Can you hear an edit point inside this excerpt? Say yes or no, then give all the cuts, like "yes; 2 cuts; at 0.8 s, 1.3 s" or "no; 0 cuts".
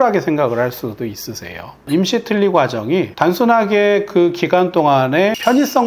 yes; 2 cuts; at 1.8 s, 3.1 s